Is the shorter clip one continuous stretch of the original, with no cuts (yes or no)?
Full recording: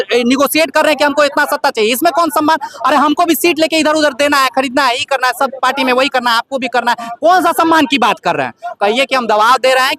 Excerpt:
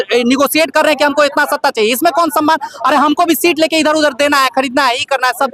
yes